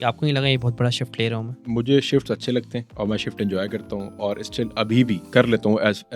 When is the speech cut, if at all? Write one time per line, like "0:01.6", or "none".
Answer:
none